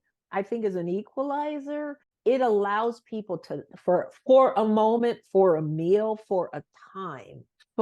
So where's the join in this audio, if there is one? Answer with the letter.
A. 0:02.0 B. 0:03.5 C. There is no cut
A